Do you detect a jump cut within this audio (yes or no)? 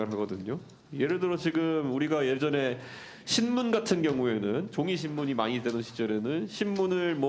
no